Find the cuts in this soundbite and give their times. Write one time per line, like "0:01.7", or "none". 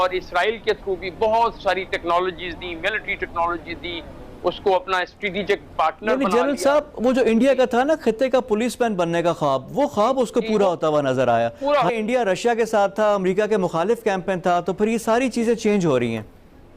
0:11.9